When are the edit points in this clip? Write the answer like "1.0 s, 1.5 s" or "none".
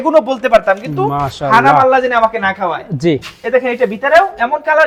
none